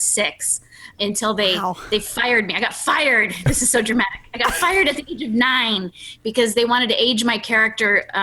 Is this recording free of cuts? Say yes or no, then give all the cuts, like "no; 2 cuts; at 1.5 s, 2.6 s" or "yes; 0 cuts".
no; 1 cut; at 0.9 s